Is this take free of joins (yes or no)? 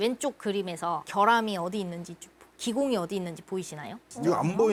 yes